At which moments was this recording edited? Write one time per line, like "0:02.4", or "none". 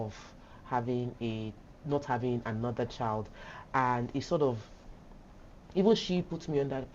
none